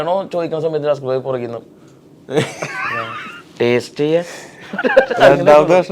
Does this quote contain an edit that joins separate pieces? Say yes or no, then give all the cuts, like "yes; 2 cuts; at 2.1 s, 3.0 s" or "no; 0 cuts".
no; 0 cuts